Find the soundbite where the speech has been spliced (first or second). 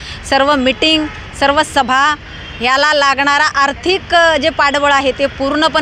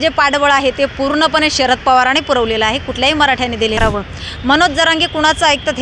second